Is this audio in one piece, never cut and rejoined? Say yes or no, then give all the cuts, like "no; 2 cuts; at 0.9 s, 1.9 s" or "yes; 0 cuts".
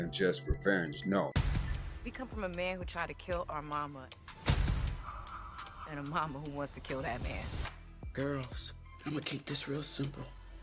no; 1 cut; at 1.3 s